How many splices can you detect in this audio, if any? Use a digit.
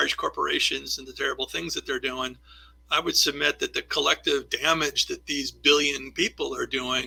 0